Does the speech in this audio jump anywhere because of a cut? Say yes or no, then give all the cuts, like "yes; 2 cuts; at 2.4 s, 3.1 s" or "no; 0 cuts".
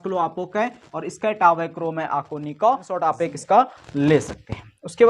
yes; 1 cut; at 3.1 s